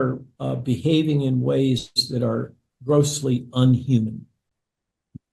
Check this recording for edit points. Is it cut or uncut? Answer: uncut